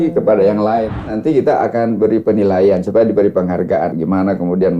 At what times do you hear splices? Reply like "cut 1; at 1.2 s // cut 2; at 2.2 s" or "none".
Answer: cut 1; at 1.1 s // cut 2; at 3.9 s